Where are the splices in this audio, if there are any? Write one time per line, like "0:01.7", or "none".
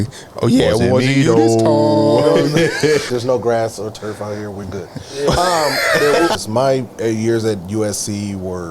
0:03.1
0:06.3

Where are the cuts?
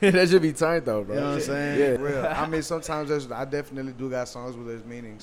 0:02.0

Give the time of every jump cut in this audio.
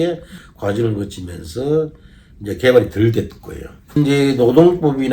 0:04.0

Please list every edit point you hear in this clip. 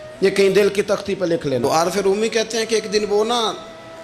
0:01.6

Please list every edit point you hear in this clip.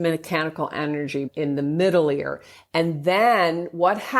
0:01.3

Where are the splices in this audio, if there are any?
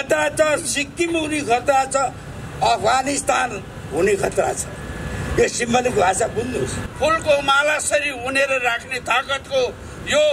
0:06.8

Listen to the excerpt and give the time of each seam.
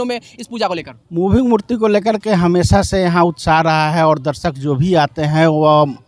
none

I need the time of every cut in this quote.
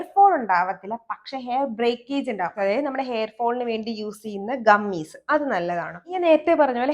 0:02.5
0:06.1

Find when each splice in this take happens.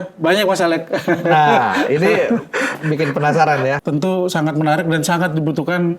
0:03.8

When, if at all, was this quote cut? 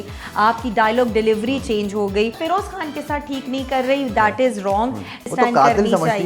0:02.4
0:05.3

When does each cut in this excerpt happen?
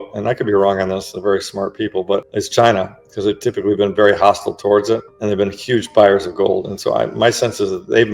0:02.3
0:05.1

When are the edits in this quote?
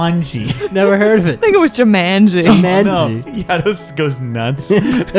0:03.3

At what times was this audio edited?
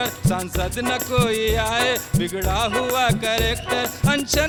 none

